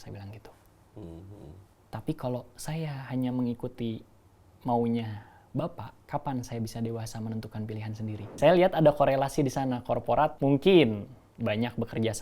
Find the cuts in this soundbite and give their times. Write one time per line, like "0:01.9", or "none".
0:05.9
0:08.3
0:10.4